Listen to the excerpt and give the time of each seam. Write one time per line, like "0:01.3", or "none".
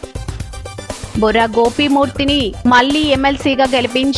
0:01.1